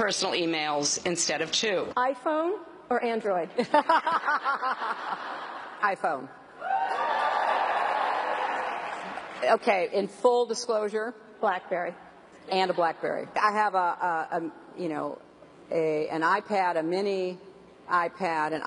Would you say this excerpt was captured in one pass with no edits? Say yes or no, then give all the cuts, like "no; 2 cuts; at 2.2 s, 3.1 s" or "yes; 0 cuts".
no; 1 cut; at 7.5 s